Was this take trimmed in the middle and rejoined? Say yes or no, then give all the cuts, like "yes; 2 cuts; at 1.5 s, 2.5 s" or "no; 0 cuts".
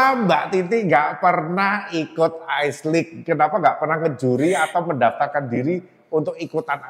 no; 0 cuts